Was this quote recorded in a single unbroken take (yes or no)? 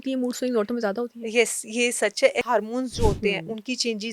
no